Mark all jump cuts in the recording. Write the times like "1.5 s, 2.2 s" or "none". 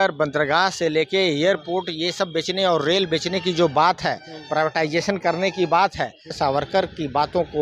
6.3 s